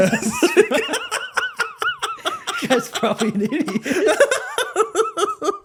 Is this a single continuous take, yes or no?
yes